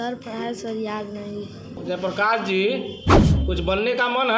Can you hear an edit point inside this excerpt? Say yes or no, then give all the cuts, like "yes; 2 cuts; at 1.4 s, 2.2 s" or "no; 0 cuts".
yes; 1 cut; at 1.8 s